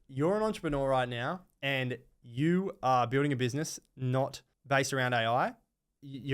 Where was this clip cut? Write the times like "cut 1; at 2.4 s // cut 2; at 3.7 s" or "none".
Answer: cut 1; at 4.5 s